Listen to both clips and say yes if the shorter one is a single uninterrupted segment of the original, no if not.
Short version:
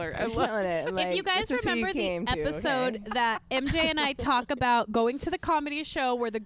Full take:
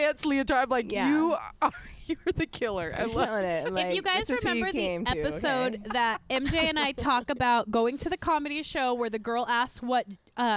yes